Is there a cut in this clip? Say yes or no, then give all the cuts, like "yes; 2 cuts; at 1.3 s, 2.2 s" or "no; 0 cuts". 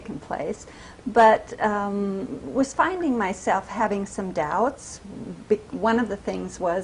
no; 0 cuts